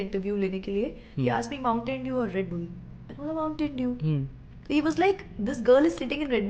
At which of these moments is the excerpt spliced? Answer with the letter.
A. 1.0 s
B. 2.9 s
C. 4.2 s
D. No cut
A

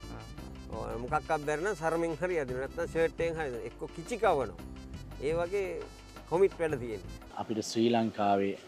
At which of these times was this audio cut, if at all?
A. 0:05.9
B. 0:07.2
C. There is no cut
B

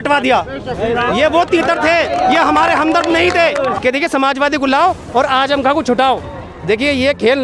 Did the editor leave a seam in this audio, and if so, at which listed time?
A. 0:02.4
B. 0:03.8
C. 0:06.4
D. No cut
B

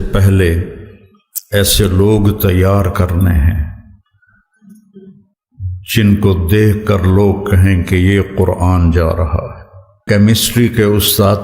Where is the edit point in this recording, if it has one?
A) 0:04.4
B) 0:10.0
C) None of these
B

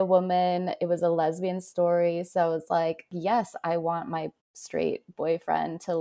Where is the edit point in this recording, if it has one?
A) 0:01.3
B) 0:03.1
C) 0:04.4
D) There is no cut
B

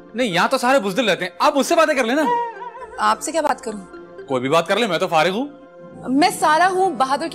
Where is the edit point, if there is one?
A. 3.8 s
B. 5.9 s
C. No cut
C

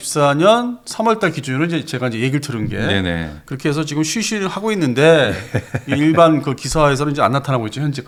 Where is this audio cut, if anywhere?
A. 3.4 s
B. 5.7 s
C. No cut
C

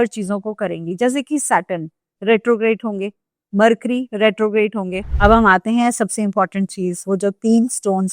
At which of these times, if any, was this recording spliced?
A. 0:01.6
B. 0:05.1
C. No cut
B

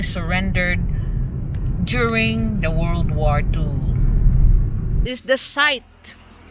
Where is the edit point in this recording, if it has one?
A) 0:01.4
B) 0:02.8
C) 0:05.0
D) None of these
C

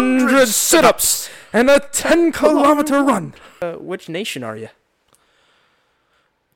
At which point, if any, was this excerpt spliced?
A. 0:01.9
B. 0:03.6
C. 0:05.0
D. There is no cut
B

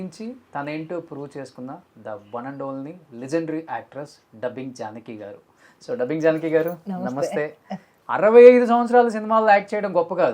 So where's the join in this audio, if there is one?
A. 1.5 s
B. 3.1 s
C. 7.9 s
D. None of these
C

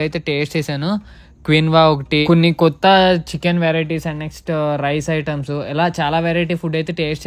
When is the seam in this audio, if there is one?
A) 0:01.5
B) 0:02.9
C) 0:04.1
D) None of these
D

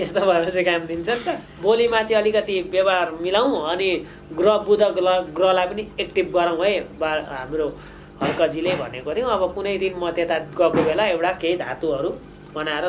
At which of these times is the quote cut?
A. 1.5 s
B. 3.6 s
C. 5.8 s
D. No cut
A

